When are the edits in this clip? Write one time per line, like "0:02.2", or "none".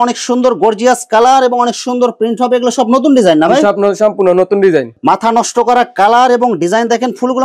0:04.9